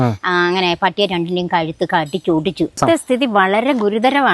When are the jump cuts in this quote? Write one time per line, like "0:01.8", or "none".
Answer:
0:02.8